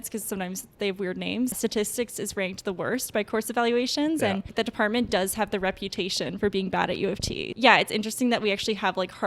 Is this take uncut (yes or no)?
no